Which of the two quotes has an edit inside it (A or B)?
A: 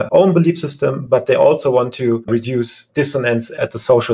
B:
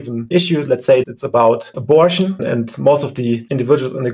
A